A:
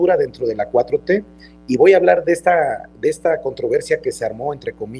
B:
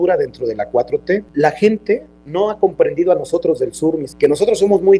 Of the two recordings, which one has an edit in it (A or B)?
B